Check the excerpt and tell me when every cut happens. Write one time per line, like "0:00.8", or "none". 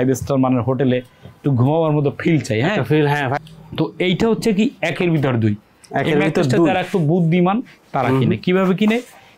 0:03.3